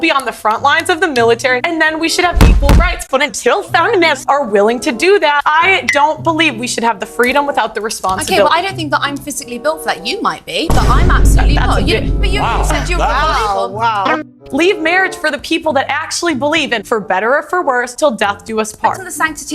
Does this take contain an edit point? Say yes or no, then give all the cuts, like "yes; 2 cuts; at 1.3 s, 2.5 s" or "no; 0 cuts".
yes; 1 cut; at 1.6 s